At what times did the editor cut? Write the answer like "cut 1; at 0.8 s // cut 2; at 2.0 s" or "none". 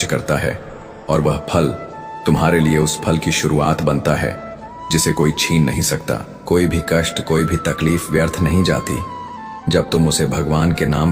none